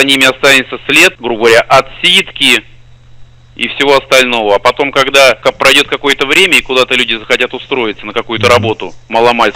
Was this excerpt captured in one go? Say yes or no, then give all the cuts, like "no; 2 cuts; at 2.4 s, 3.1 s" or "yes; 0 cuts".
no; 2 cuts; at 1.2 s, 5.4 s